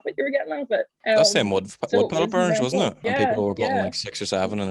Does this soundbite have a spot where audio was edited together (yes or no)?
yes